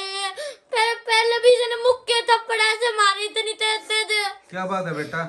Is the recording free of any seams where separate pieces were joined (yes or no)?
yes